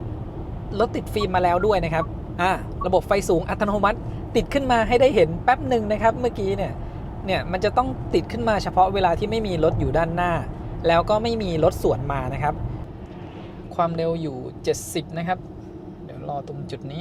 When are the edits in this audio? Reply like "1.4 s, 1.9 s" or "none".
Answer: 12.8 s